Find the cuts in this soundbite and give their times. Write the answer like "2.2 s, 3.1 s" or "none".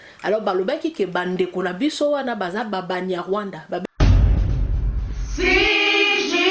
3.8 s